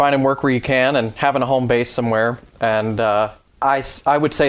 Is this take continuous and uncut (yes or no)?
no